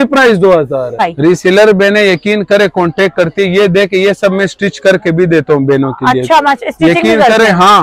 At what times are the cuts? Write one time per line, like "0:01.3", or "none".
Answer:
0:01.0